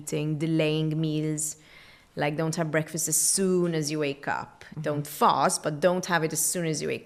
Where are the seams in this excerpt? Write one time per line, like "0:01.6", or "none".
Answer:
none